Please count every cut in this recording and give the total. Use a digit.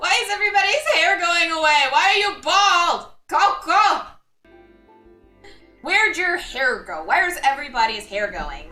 1